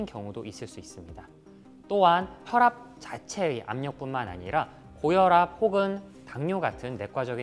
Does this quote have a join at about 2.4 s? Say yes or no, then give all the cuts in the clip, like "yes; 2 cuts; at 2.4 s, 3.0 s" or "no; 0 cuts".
yes; 1 cut; at 2.4 s